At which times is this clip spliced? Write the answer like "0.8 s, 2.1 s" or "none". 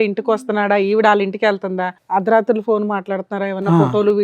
1.9 s